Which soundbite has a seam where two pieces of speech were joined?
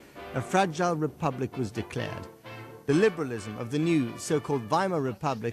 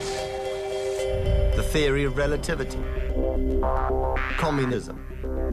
second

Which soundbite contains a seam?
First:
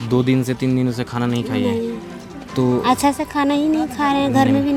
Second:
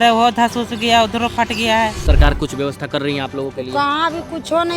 second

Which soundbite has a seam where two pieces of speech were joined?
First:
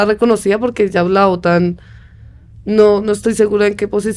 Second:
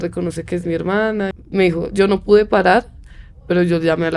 second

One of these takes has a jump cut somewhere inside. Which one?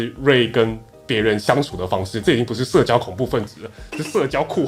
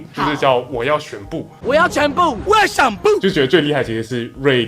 second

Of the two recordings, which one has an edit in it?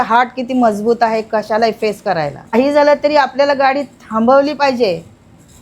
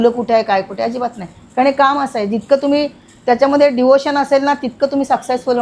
first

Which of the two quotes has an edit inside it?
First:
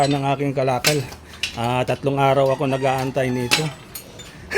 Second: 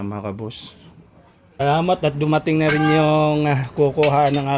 second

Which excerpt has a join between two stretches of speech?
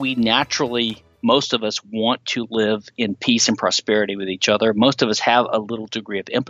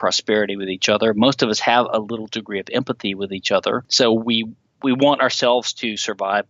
second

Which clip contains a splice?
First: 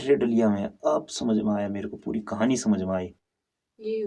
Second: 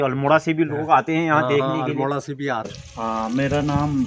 second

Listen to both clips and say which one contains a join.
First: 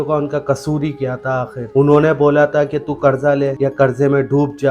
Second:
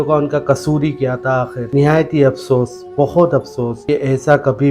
second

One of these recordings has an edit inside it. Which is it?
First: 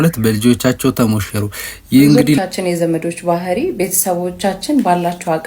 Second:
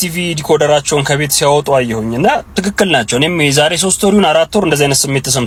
first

